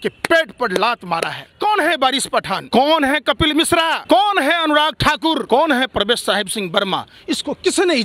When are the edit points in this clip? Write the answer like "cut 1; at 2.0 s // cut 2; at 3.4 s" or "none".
cut 1; at 1.4 s // cut 2; at 2.6 s // cut 3; at 4.0 s // cut 4; at 5.4 s